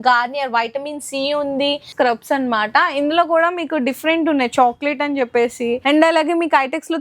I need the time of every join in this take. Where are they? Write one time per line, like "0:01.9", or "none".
0:01.9
0:05.8